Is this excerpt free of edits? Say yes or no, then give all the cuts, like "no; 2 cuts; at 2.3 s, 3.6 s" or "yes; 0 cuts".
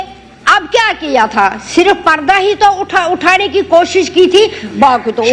yes; 0 cuts